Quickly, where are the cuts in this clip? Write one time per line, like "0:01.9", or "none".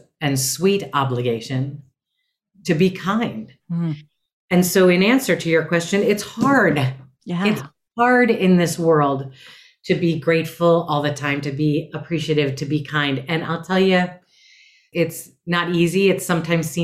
0:14.8